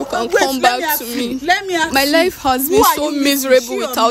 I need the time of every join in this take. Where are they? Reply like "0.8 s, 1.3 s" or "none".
none